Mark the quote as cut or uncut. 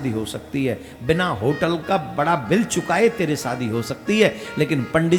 uncut